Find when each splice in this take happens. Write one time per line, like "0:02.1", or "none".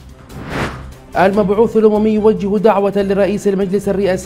0:01.1